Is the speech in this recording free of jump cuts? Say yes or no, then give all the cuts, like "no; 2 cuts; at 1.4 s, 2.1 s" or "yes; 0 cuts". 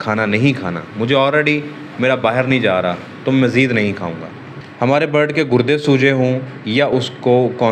no; 1 cut; at 4.6 s